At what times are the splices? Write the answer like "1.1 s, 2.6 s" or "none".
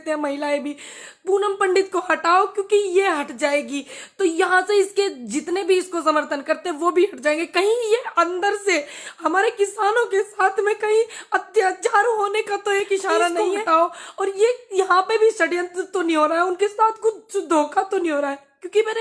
13.5 s

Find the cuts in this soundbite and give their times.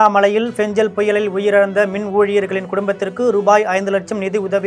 none

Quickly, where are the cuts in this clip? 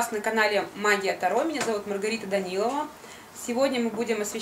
none

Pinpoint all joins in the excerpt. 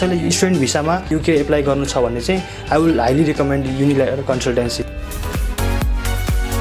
1.1 s

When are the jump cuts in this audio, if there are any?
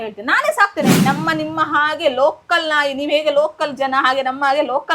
1.0 s

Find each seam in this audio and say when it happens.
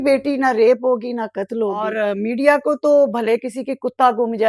2.0 s

